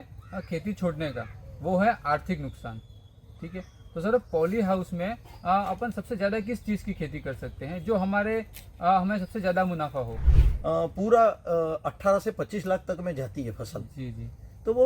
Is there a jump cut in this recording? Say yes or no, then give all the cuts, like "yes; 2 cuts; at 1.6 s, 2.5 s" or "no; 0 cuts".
yes; 1 cut; at 10.4 s